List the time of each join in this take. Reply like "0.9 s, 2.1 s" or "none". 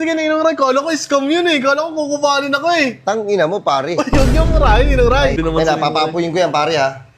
5.4 s